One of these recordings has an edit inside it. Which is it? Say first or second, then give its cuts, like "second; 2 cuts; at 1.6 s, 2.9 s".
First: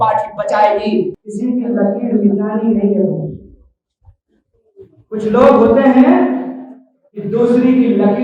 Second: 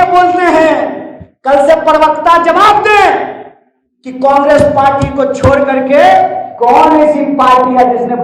first; 1 cut; at 1.1 s